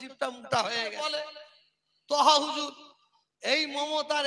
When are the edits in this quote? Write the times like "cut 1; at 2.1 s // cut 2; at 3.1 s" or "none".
cut 1; at 1.1 s